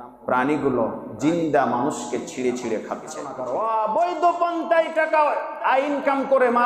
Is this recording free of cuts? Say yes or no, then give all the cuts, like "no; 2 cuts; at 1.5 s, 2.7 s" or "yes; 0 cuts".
no; 1 cut; at 3.4 s